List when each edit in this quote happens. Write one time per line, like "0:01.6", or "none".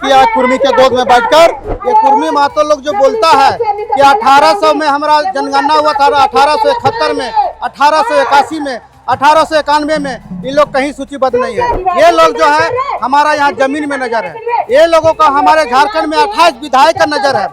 0:01.7
0:11.8